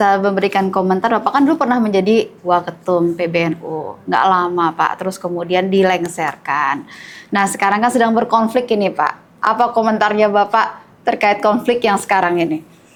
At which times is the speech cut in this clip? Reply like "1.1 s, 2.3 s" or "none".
none

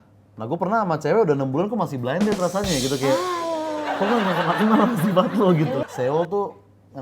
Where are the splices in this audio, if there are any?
5.8 s

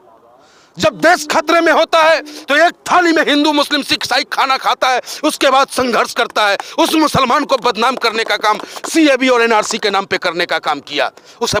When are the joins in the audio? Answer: none

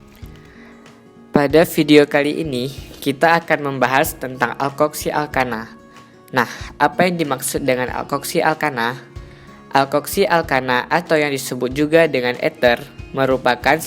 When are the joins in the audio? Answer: 1.2 s

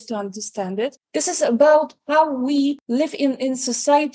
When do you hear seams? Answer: 1.0 s, 2.8 s

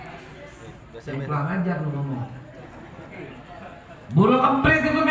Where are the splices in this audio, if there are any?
none

